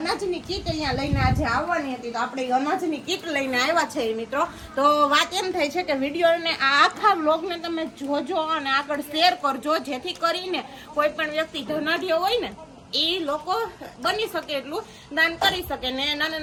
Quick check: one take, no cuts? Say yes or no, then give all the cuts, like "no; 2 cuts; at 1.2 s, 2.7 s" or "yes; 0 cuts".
yes; 0 cuts